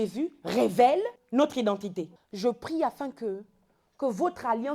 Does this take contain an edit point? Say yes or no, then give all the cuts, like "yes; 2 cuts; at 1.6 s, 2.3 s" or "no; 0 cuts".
yes; 2 cuts; at 1.2 s, 2.2 s